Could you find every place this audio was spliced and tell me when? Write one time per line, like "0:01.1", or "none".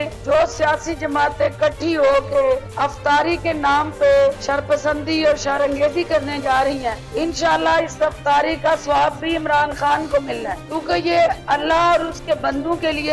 none